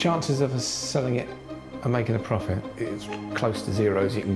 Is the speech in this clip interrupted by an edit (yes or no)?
yes